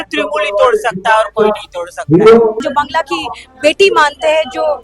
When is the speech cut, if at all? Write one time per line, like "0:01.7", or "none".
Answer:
0:02.6

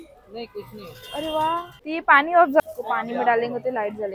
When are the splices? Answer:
0:01.7
0:02.6

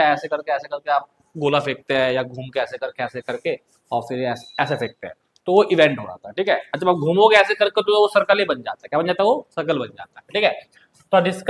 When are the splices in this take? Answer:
none

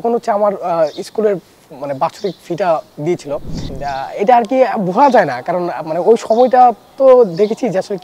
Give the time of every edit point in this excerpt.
none

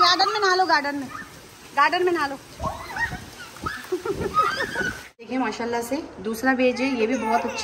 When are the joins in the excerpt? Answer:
0:05.1

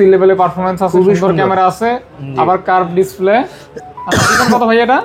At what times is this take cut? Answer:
none

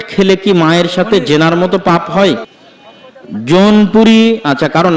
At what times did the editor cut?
0:02.5

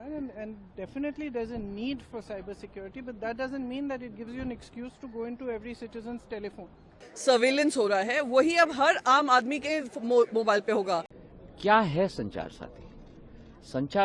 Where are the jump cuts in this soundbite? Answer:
0:07.0
0:11.2

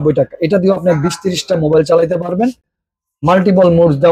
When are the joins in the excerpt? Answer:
none

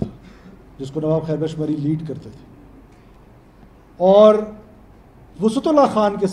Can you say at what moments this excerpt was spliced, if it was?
none

